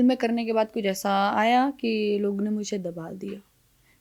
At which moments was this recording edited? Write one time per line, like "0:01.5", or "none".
none

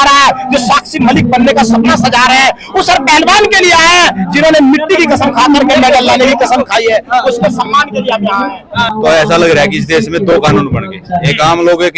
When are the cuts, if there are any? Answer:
0:08.9

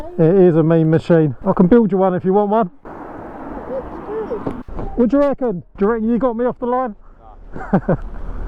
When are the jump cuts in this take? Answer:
0:01.4
0:04.6

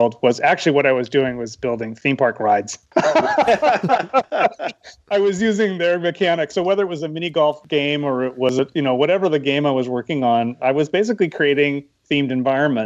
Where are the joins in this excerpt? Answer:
0:07.6

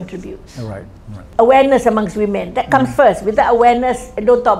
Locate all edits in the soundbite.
0:01.2

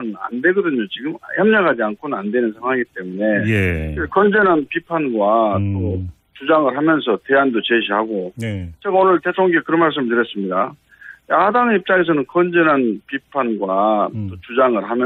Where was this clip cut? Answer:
none

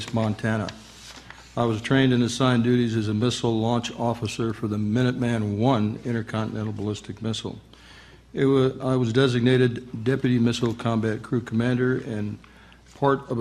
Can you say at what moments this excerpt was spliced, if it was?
0:04.0

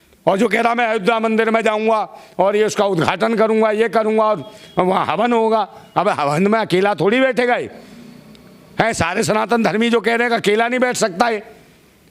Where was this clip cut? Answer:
none

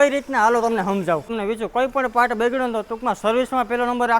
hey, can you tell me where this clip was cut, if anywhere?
0:01.3

